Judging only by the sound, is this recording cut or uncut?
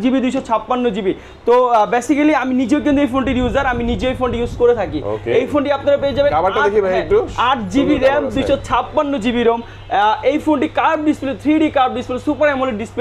uncut